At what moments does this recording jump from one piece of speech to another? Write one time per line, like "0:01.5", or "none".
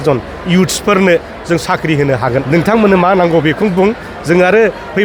0:02.5